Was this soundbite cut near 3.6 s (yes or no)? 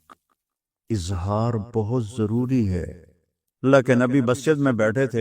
yes